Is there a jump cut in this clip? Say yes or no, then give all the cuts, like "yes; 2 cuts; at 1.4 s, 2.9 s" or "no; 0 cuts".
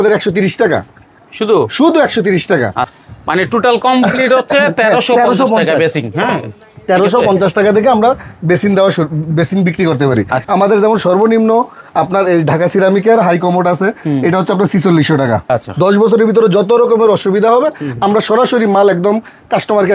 yes; 2 cuts; at 2.9 s, 15.4 s